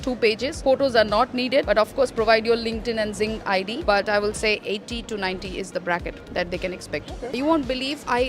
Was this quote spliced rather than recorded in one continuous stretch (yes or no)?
yes